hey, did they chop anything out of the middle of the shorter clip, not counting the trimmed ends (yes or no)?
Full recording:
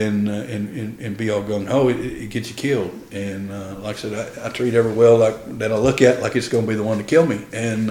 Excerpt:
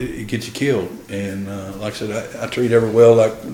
no